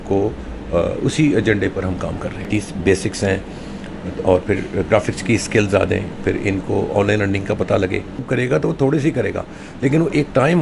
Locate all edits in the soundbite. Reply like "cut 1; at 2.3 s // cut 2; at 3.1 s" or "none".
cut 1; at 2.5 s // cut 2; at 8.3 s